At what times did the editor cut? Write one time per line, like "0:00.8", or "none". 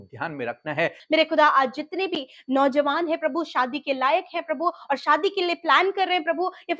0:01.0